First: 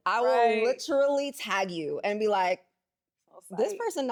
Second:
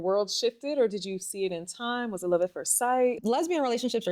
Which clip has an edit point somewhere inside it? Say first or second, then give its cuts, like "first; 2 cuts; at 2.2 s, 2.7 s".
second; 1 cut; at 3.2 s